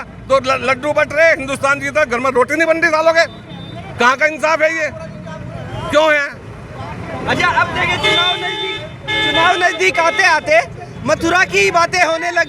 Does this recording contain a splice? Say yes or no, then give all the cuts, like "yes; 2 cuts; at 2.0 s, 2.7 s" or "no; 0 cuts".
no; 0 cuts